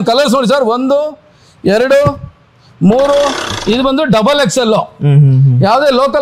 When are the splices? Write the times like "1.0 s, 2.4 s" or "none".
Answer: 3.5 s